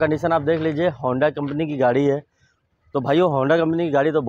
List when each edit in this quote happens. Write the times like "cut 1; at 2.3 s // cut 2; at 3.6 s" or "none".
none